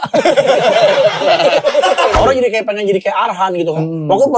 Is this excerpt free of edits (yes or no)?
no